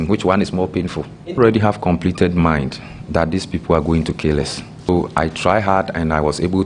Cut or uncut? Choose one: cut